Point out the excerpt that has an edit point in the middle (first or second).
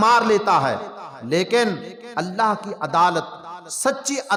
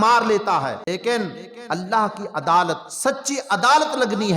second